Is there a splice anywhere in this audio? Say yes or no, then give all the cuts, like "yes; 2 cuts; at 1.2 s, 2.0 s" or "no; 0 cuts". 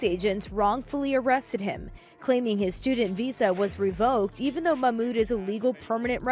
no; 0 cuts